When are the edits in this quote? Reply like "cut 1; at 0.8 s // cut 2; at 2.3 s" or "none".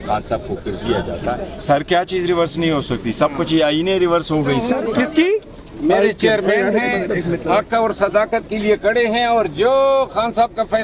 cut 1; at 1.5 s // cut 2; at 4.8 s